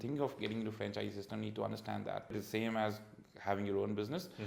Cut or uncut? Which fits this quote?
cut